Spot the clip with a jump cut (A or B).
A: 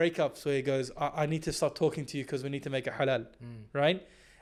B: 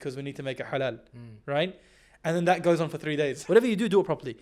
B